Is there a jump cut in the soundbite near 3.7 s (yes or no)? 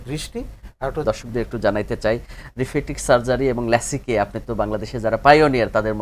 no